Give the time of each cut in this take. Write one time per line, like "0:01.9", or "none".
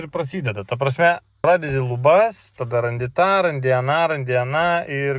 0:01.4

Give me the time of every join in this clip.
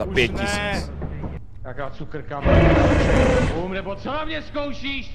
0:01.4

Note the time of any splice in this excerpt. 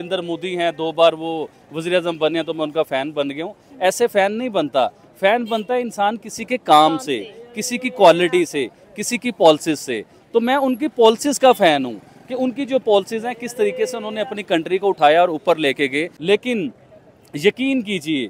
0:16.1

